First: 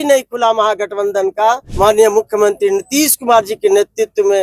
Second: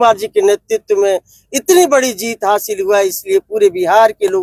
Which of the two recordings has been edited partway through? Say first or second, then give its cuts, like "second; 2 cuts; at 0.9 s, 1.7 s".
first; 1 cut; at 1.7 s